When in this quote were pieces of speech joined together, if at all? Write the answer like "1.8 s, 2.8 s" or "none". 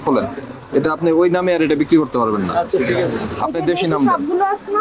none